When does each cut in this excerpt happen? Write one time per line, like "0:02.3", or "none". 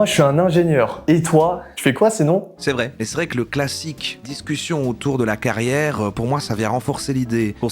0:03.0